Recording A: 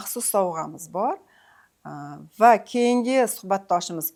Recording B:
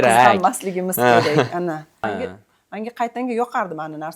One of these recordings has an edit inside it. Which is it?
B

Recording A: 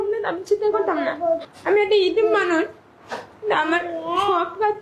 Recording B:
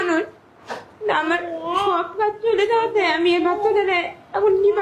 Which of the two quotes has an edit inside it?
A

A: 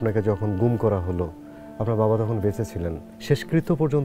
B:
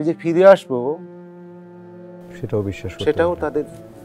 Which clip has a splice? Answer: A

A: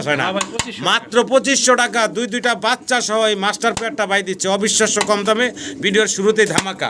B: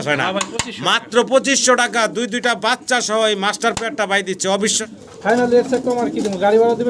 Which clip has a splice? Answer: B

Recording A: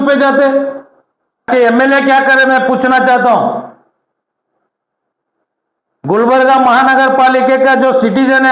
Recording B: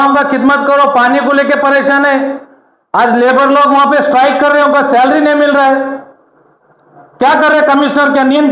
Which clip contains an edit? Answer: A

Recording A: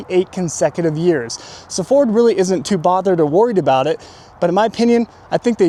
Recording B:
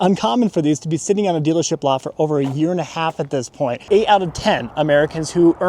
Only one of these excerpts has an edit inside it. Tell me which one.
B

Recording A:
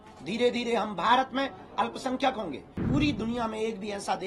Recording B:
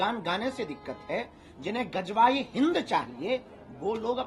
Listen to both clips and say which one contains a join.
A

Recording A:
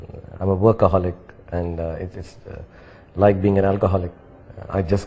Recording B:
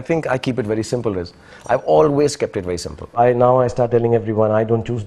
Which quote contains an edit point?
B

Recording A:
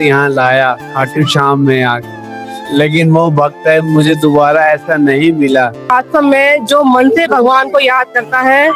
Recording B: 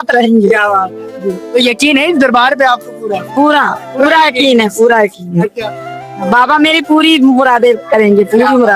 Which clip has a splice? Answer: A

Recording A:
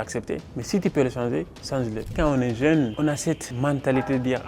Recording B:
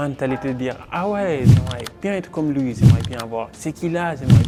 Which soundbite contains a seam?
A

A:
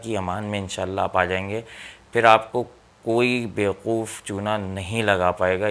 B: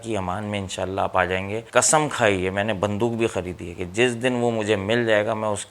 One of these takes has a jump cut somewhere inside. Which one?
B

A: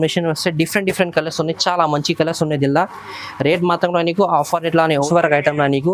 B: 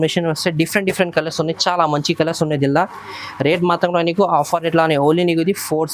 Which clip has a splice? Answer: A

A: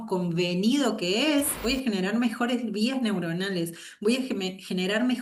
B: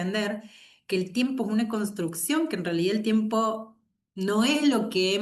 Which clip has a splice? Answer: A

